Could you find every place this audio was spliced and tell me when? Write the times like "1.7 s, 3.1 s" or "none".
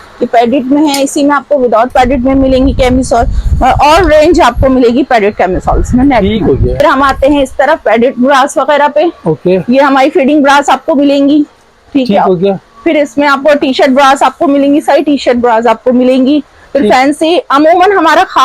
none